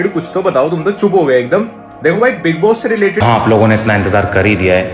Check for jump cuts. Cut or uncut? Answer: cut